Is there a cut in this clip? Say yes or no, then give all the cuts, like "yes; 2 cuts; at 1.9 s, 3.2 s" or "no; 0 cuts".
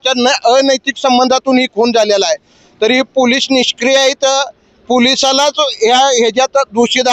no; 0 cuts